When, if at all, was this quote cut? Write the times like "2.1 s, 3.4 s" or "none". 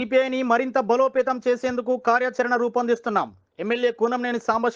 none